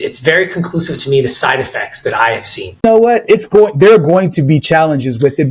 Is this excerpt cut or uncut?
cut